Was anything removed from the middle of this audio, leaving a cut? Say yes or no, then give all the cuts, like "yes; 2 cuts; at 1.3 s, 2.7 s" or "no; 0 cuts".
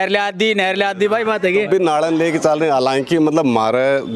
no; 0 cuts